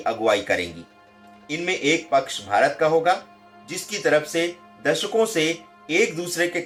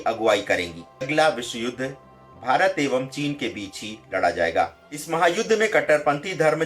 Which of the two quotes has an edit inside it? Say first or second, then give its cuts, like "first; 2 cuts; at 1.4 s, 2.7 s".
second; 2 cuts; at 1.1 s, 4.9 s